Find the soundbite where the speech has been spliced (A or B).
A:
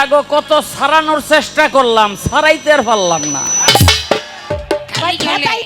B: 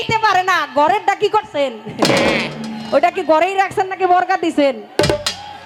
A